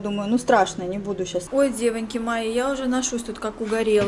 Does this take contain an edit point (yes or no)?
yes